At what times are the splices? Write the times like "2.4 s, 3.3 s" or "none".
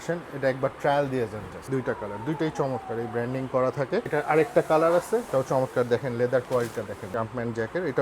1.6 s, 4.1 s, 5.3 s, 7.1 s